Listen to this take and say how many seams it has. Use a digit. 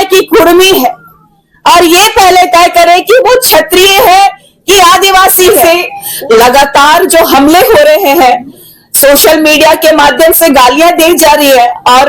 1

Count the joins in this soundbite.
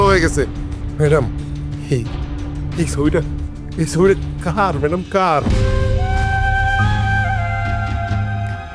0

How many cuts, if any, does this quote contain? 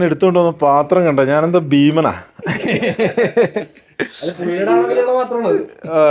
0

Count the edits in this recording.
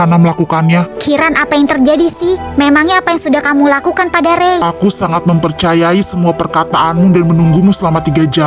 1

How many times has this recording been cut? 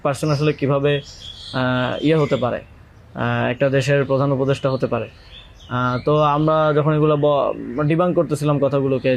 0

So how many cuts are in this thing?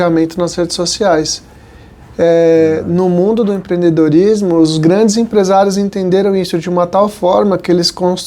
0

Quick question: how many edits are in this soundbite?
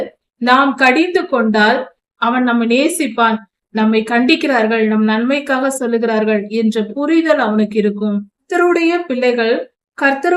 2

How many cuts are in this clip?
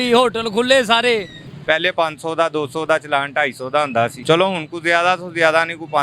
2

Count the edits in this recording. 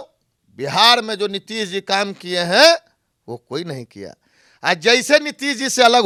0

